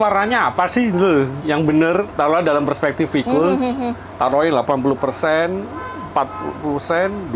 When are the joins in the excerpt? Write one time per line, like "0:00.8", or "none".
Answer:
0:01.4